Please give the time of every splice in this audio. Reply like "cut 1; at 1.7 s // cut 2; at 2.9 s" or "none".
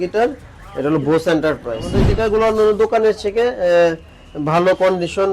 cut 1; at 2.0 s